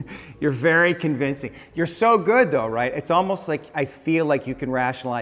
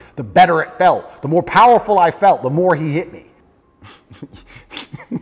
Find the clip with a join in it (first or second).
second